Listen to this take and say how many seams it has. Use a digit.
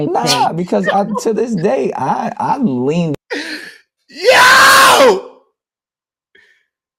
0